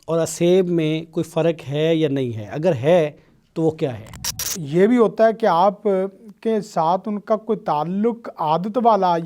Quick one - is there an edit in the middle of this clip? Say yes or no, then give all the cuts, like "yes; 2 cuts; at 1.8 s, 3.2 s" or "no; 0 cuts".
yes; 1 cut; at 4.5 s